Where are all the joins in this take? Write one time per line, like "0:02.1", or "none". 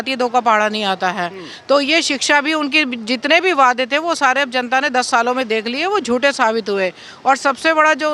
none

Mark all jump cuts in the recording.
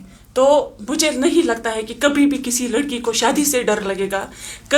none

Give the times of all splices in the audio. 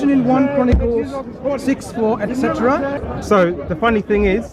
0:03.0

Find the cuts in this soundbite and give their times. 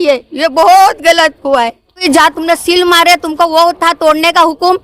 0:01.9

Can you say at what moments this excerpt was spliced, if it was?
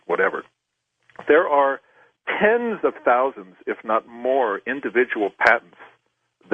0:03.3

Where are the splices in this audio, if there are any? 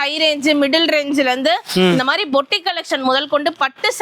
none

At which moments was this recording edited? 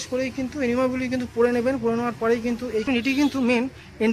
0:02.8

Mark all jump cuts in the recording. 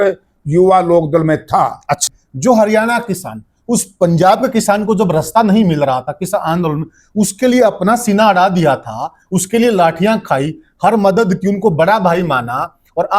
0:02.0

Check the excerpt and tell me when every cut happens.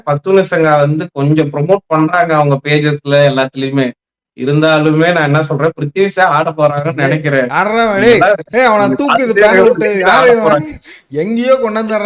none

